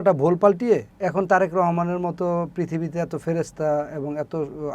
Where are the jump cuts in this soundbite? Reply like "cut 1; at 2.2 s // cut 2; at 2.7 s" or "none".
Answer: cut 1; at 0.9 s